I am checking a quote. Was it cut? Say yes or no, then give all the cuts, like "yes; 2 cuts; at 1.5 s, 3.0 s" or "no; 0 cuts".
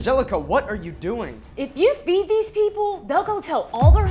yes; 1 cut; at 1.4 s